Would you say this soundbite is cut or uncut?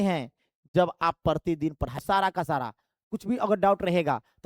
cut